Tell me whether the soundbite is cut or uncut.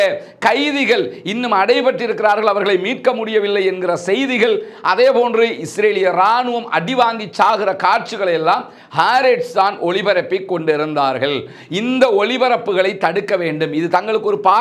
uncut